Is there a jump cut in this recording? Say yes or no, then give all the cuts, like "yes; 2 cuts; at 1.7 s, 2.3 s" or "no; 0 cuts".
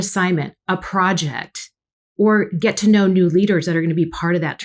no; 0 cuts